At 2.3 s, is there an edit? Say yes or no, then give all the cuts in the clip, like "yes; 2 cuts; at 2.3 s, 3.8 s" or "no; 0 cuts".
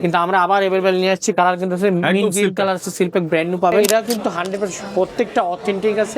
no; 1 cut; at 3.9 s